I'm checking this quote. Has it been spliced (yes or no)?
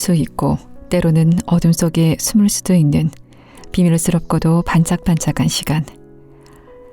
yes